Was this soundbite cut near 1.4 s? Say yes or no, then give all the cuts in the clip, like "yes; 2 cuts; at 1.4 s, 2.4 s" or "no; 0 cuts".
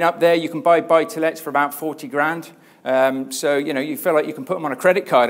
no; 0 cuts